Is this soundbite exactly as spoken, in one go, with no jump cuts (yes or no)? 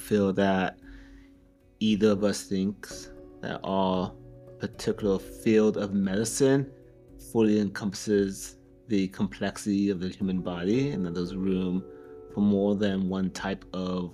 yes